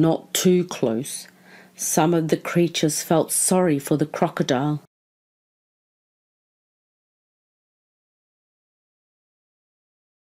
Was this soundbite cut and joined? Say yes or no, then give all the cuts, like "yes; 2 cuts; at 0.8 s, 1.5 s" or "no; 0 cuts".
no; 0 cuts